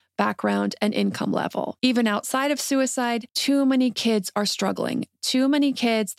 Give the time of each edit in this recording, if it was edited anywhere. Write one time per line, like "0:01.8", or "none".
0:01.7
0:03.3

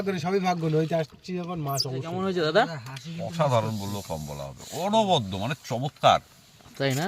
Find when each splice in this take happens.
0:02.1

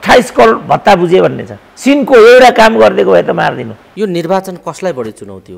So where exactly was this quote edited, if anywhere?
0:03.8

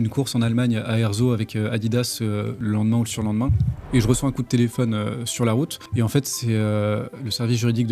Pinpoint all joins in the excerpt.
0:02.5
0:03.7
0:05.8

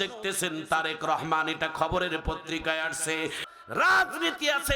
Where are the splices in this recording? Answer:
0:03.4

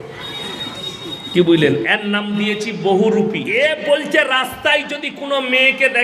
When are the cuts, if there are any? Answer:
0:03.4

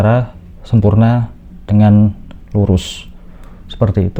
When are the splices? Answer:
none

